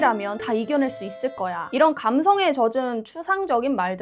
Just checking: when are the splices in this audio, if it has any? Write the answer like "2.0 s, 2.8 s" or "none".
none